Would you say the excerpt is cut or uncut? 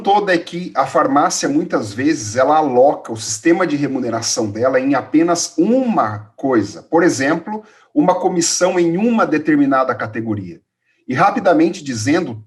uncut